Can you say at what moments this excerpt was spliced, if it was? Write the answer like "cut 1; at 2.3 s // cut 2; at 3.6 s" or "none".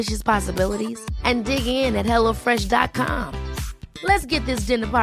none